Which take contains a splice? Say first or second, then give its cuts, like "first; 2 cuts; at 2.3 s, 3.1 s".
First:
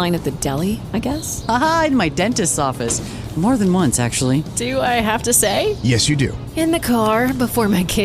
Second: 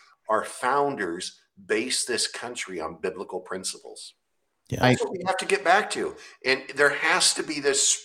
second; 1 cut; at 4.8 s